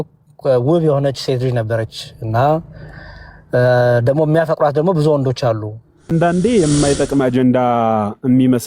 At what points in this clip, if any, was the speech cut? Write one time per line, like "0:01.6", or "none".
0:06.1